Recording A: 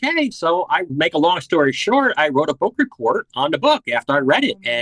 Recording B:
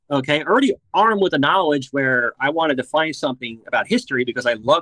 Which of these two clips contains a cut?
A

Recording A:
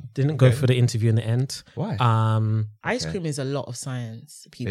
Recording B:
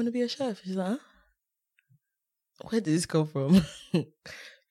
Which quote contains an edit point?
A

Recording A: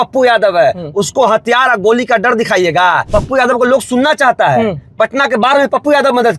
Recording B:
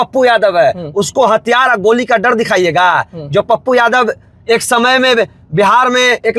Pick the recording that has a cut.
A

